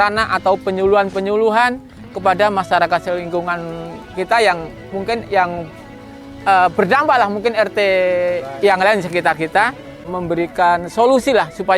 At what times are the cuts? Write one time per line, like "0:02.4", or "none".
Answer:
0:10.1